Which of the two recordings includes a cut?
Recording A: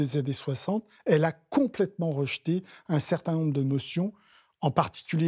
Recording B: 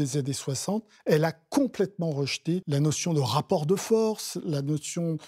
B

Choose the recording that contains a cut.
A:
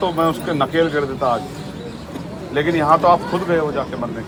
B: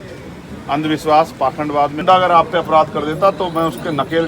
B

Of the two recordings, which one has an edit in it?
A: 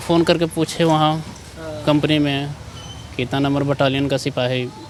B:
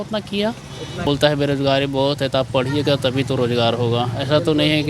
B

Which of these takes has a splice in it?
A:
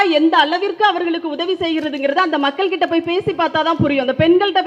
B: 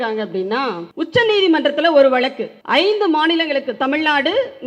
B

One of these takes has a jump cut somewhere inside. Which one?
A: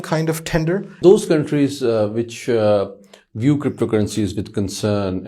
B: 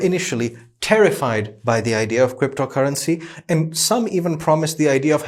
A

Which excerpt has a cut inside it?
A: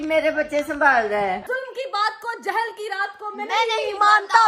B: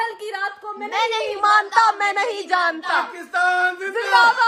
A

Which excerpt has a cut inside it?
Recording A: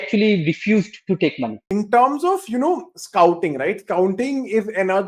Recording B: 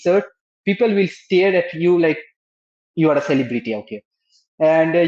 A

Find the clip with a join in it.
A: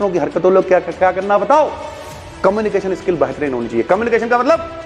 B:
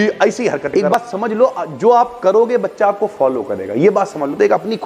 B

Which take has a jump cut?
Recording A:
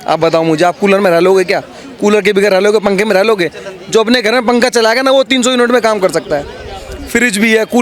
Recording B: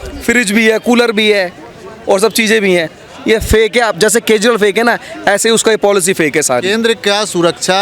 B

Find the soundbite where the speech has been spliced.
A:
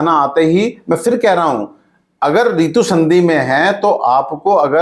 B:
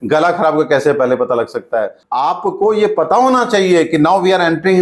B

